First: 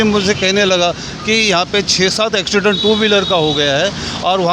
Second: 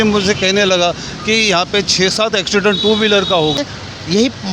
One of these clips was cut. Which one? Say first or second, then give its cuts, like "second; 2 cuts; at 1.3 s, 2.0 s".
second; 1 cut; at 3.6 s